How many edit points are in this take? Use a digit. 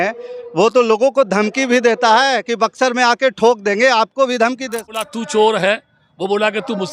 1